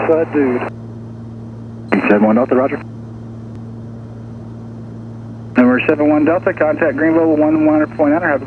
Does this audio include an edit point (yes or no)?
yes